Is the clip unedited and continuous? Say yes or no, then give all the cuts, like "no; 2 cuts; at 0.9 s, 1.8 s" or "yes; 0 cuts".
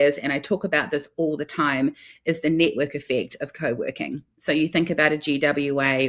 yes; 0 cuts